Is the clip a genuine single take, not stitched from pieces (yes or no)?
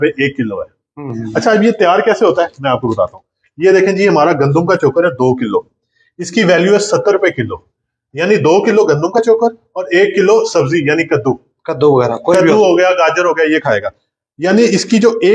yes